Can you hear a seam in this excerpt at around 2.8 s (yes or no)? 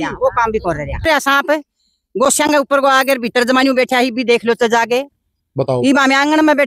no